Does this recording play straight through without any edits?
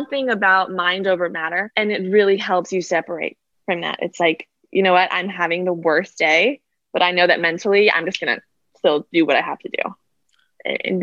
no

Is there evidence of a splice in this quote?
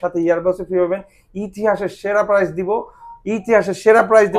no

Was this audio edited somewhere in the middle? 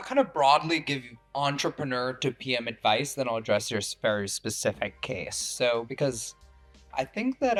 no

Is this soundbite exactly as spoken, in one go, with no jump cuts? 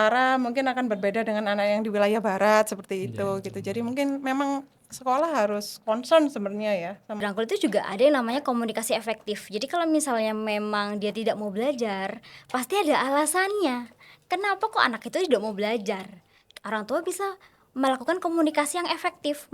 no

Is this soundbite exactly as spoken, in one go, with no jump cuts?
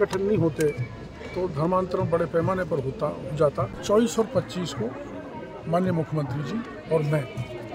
no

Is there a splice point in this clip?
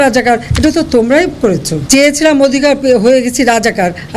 yes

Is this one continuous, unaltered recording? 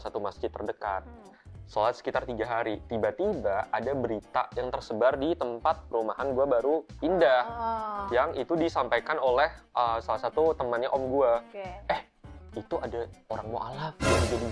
yes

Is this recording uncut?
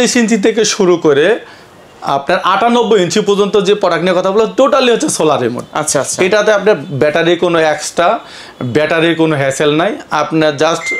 yes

